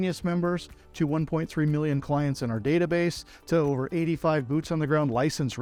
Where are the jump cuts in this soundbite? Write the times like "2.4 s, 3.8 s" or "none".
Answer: none